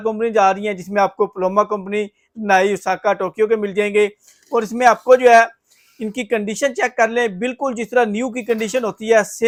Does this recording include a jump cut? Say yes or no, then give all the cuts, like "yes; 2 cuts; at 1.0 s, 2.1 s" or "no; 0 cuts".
no; 0 cuts